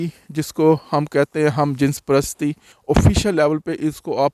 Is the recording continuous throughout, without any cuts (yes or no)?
no